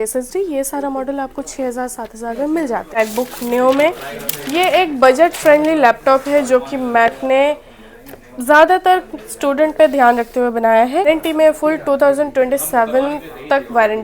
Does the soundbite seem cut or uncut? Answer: cut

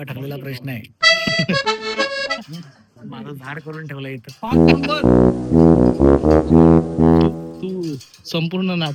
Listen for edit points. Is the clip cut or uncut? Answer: uncut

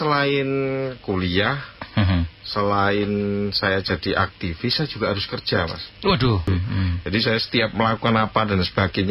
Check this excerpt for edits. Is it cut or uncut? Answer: cut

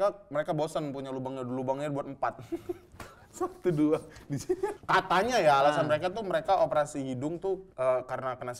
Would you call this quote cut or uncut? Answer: cut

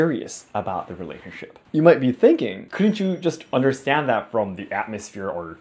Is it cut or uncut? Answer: cut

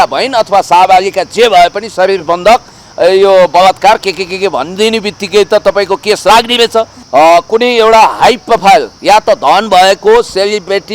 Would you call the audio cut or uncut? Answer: cut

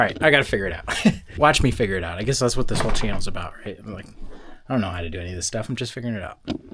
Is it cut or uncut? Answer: cut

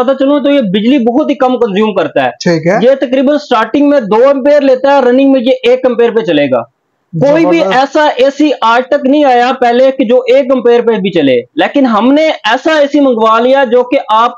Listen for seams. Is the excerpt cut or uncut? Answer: uncut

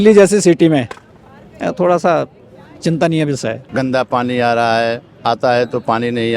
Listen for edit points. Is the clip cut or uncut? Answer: cut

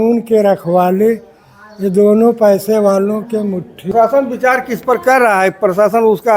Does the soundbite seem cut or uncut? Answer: cut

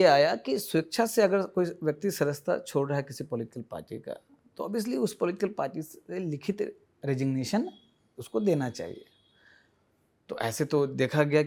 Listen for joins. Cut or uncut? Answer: uncut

